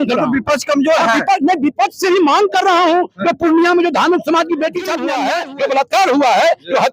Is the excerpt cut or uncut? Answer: cut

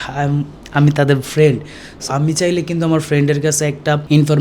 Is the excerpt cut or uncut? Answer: cut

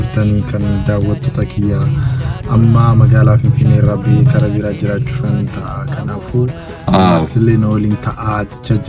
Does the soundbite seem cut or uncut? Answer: uncut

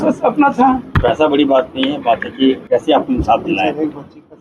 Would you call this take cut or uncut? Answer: cut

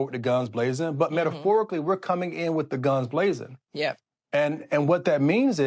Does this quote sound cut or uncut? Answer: uncut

